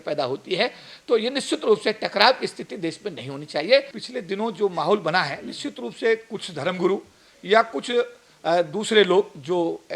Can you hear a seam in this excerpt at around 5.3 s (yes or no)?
no